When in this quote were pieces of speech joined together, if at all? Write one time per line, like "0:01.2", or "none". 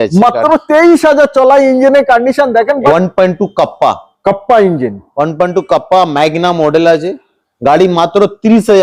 0:02.8